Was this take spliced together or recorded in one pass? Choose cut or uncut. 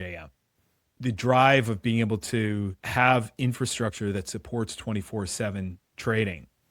cut